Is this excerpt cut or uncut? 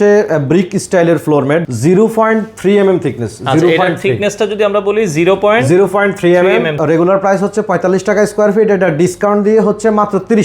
cut